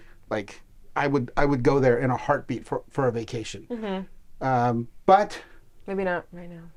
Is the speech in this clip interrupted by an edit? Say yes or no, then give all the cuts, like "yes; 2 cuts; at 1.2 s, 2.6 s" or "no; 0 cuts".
no; 0 cuts